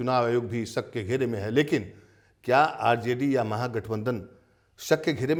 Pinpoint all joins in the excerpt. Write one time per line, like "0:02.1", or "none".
none